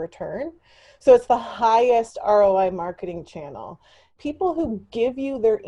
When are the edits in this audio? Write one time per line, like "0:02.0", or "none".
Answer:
0:04.2